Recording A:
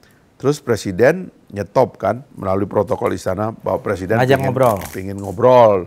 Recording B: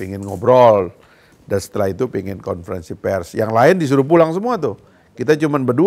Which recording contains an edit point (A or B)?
A